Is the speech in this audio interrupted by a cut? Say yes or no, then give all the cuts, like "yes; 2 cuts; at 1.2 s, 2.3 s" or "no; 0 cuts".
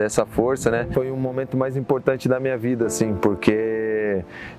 no; 0 cuts